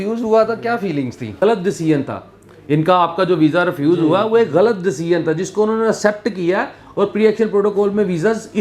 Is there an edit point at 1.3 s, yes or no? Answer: yes